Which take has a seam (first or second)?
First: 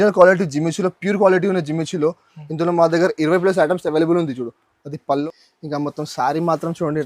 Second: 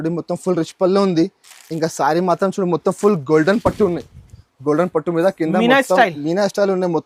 first